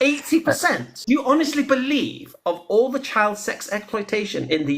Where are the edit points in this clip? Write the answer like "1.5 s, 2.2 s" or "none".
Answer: 0.9 s